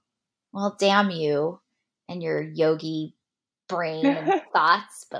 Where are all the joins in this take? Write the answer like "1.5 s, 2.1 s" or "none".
none